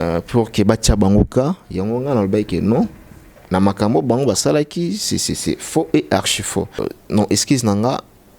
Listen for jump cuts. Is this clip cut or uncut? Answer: cut